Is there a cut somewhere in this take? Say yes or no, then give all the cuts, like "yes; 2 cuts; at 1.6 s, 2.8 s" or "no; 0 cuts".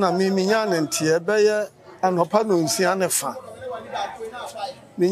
no; 0 cuts